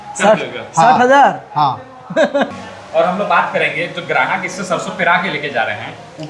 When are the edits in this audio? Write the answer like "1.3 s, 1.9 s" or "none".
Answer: 2.5 s